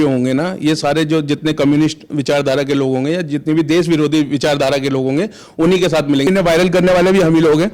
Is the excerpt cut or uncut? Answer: cut